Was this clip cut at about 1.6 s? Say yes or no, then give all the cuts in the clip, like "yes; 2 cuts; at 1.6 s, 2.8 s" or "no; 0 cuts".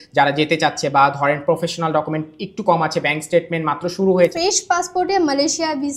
no; 1 cut; at 4.3 s